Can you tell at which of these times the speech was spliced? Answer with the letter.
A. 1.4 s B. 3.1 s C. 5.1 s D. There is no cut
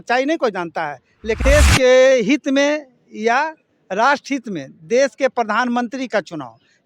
A